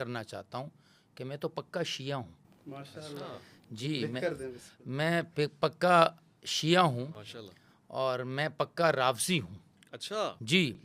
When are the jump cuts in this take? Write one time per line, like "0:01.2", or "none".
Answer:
none